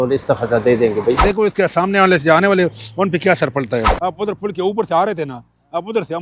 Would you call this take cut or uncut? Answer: cut